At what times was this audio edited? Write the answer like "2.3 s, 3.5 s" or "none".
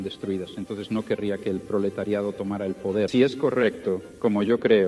3.1 s